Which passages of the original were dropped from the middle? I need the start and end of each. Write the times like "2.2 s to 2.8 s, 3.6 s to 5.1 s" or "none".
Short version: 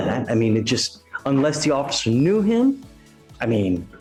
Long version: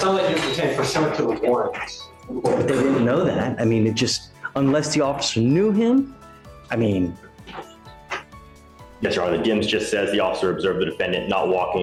none

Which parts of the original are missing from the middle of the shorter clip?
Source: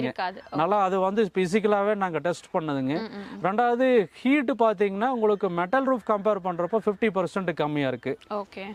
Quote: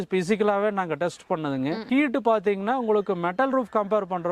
3.0 s to 4.1 s

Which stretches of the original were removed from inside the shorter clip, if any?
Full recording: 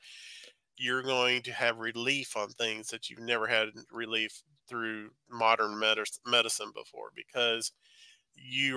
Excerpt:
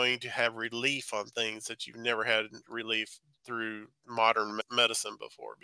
5.8 s to 6.2 s

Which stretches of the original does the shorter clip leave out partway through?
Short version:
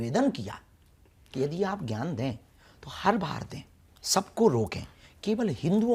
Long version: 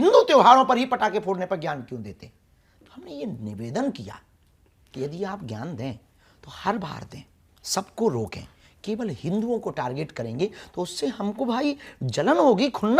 none

